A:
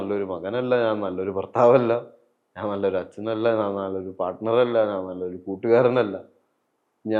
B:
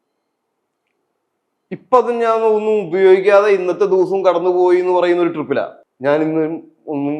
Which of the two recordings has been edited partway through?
B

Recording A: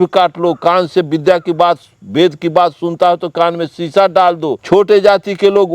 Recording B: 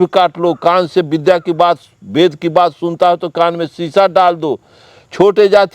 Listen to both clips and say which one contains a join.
A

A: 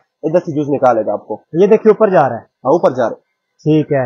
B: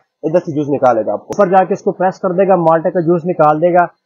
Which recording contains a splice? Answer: B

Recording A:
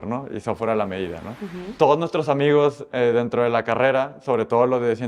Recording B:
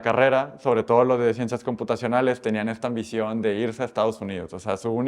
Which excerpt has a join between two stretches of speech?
A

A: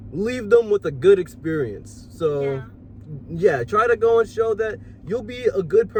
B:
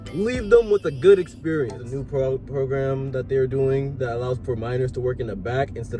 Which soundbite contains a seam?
B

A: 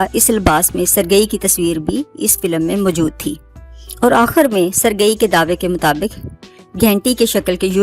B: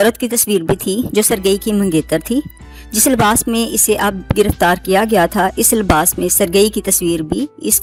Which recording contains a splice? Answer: A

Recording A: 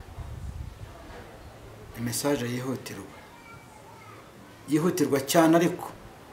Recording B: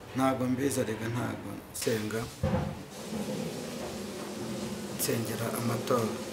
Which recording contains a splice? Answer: B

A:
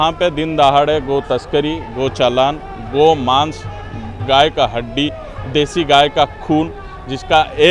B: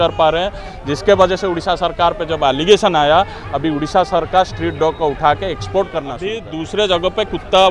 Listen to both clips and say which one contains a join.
B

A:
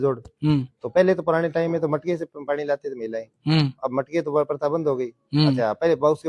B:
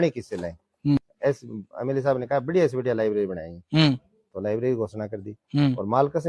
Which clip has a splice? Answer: B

